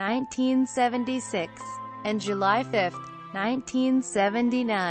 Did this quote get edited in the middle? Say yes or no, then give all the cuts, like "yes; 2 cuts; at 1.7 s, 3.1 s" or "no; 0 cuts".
yes; 1 cut; at 1.3 s